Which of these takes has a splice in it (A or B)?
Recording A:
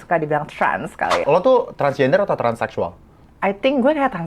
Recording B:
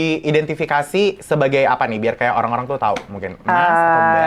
A